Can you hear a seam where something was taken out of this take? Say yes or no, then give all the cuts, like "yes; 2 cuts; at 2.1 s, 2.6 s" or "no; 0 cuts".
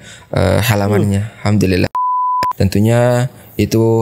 yes; 1 cut; at 2.1 s